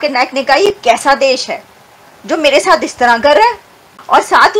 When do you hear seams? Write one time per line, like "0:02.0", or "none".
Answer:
none